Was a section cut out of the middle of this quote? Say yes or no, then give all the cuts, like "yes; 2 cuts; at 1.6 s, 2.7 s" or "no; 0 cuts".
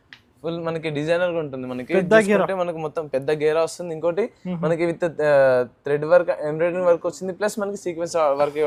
no; 0 cuts